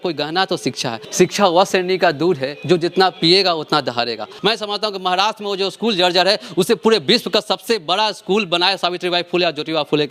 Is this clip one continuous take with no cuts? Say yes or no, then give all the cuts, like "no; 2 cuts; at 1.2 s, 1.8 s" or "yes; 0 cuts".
no; 2 cuts; at 1.0 s, 4.3 s